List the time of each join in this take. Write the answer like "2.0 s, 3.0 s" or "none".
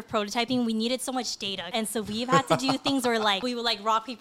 1.7 s, 3.4 s